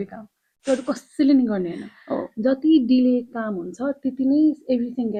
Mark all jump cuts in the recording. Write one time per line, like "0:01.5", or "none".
none